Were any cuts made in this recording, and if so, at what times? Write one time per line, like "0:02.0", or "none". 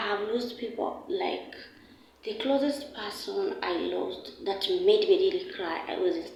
none

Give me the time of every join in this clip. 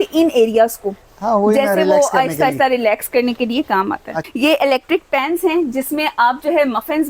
0:04.2

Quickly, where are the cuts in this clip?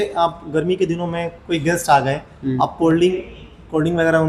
none

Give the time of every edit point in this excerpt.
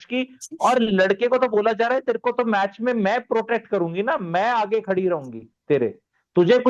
none

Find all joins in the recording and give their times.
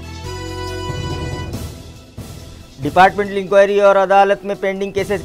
0:01.8

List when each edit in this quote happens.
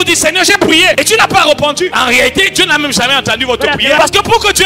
0:00.9
0:01.9
0:04.0

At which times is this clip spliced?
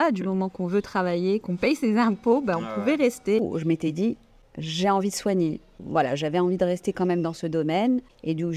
0:03.4

